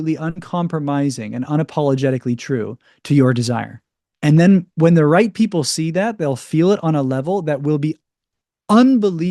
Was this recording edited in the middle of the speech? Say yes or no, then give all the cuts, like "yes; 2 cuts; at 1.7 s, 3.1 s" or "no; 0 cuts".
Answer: no; 0 cuts